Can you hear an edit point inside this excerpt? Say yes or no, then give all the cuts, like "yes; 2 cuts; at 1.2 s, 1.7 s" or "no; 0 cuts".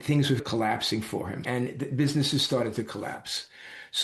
yes; 1 cut; at 1.5 s